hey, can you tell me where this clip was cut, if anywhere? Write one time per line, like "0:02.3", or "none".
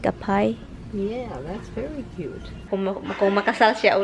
0:02.5